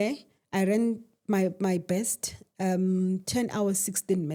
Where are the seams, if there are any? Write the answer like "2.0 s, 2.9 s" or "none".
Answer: none